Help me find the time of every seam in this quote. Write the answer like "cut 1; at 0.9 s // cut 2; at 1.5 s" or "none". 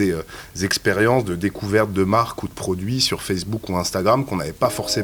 none